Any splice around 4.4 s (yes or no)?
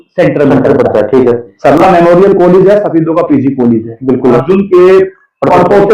yes